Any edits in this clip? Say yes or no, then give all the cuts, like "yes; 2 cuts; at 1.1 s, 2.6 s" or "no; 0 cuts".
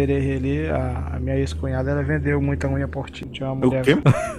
no; 0 cuts